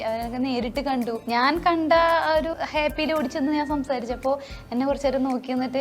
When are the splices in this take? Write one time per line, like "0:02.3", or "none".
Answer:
0:01.2
0:02.5